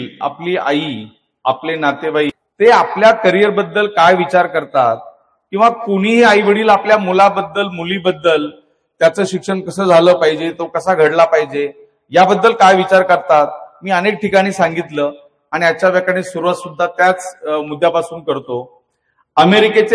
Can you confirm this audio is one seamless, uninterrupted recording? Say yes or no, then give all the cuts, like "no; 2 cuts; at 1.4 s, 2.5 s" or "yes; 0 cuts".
no; 1 cut; at 2.4 s